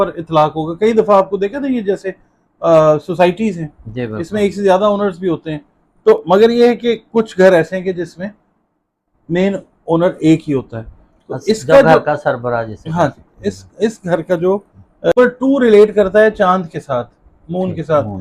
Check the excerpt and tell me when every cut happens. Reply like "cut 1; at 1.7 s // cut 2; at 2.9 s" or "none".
cut 1; at 15.1 s